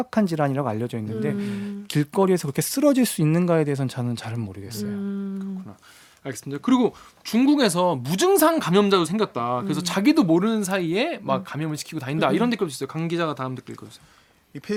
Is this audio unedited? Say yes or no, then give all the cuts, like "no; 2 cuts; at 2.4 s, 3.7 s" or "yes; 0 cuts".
yes; 0 cuts